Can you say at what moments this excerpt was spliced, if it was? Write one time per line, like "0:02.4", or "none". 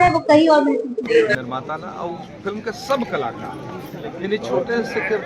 0:01.4